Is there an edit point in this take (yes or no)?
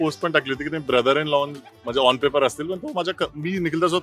no